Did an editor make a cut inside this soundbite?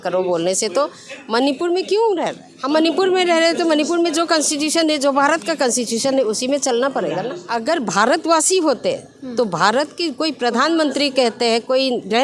yes; 2 cuts; at 2.5 s, 7.4 s

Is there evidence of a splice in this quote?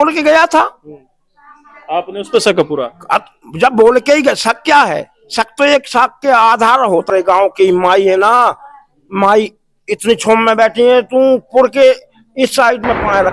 yes; 1 cut; at 7.1 s

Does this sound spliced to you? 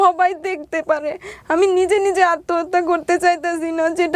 no; 0 cuts

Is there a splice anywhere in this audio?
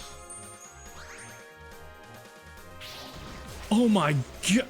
yes; 1 cut; at 2.7 s

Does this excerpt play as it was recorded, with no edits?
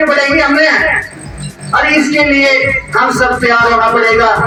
yes; 0 cuts

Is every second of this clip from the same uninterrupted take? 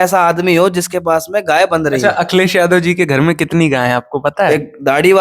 no; 2 cuts; at 2.0 s, 4.5 s

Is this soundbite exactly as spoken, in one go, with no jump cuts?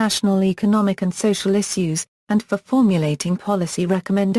no; 1 cut; at 2.9 s

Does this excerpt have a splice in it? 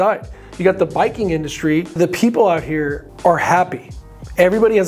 yes; 1 cut; at 2.0 s

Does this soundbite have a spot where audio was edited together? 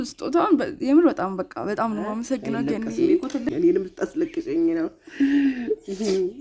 yes; 1 cut; at 3.5 s

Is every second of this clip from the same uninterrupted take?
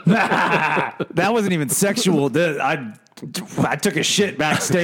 no; 1 cut; at 1.1 s

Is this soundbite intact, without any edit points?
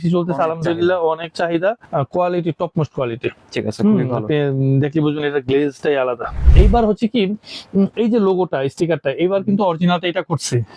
no; 2 cuts; at 1.8 s, 6.4 s

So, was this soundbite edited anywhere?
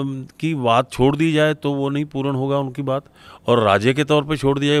no; 0 cuts

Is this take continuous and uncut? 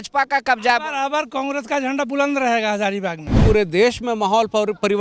no; 1 cut; at 3.4 s

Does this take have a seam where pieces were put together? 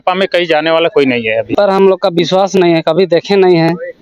yes; 1 cut; at 1.5 s

